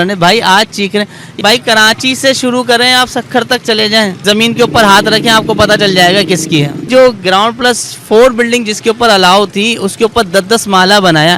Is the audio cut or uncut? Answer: cut